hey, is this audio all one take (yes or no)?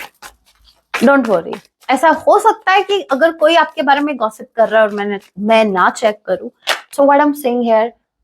no